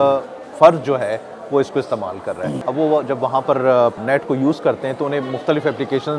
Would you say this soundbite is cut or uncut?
cut